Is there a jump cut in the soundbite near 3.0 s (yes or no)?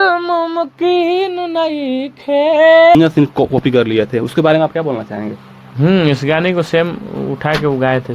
yes